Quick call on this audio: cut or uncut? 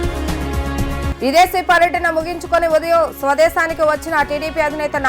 cut